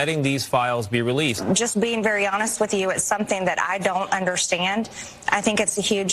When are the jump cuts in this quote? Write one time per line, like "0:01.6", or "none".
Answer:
0:01.4